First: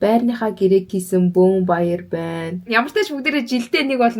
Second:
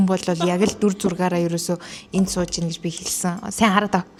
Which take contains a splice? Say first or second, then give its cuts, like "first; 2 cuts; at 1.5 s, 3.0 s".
first; 1 cut; at 2.7 s